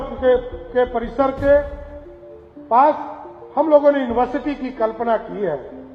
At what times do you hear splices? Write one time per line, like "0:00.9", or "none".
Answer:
none

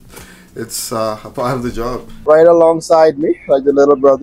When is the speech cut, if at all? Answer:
0:02.0

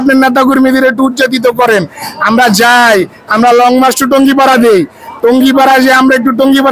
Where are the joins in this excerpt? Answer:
none

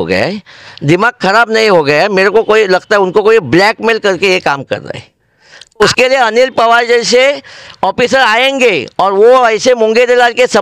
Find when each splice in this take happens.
0:05.8

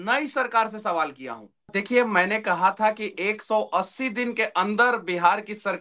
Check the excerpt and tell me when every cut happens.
0:01.8

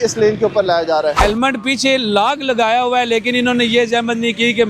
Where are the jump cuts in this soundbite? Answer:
0:01.2

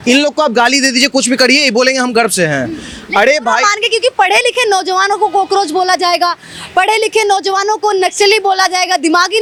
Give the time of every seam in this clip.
none

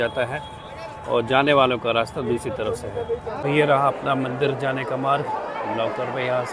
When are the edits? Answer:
0:03.4

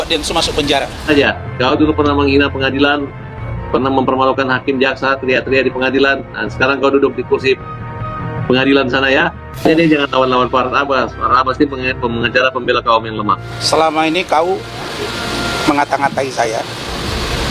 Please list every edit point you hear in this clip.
0:01.1
0:13.8

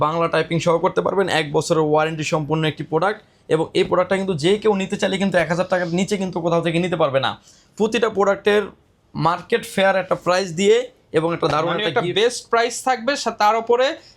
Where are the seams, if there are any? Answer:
none

